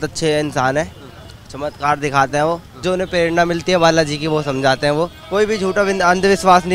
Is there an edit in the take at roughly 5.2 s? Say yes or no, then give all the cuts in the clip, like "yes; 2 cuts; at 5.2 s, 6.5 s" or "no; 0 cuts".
yes; 2 cuts; at 2.8 s, 5.2 s